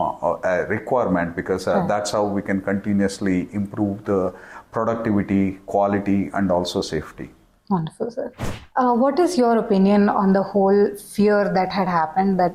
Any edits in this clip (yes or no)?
no